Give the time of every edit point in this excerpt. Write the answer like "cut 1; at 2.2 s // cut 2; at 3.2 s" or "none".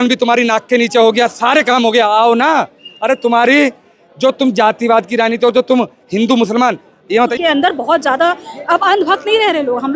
cut 1; at 7.3 s

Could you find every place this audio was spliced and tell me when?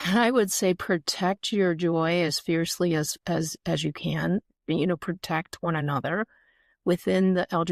none

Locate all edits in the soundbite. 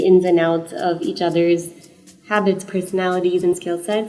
none

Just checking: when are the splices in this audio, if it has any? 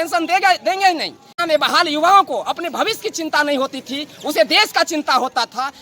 cut 1; at 1.4 s

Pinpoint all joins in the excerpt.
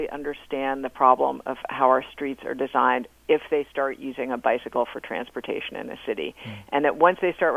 none

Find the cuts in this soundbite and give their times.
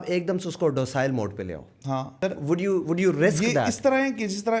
cut 1; at 2.1 s

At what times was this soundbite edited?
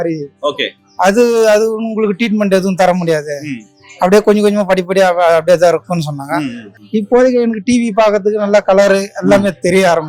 cut 1; at 6.7 s

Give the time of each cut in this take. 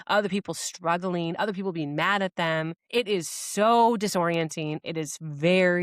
cut 1; at 2.8 s

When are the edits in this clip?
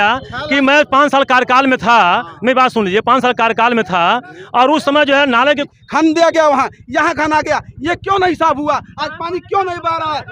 cut 1; at 5.7 s

